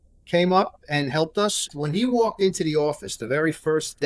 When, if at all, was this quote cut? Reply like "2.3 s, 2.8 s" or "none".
1.7 s